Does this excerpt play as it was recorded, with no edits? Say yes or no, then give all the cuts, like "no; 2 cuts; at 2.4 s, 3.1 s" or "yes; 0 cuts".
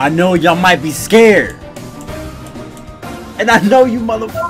yes; 0 cuts